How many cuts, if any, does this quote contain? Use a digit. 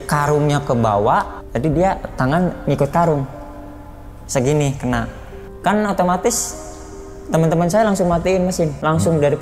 2